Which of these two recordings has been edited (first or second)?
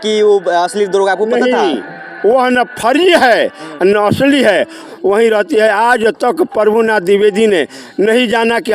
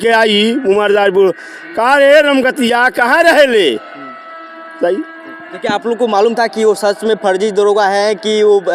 first